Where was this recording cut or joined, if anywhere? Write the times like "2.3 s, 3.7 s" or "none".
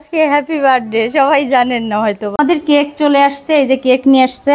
2.3 s